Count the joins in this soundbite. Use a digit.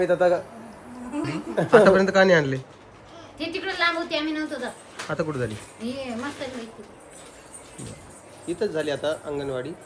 1